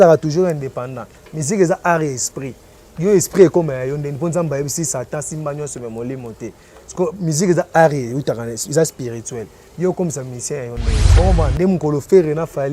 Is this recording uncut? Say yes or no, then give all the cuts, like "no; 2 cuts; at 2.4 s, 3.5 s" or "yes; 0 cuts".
no; 1 cut; at 11.0 s